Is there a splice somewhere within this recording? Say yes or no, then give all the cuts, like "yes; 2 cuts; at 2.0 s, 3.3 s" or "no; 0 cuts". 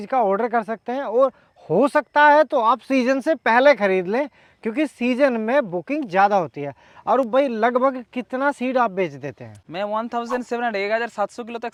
no; 0 cuts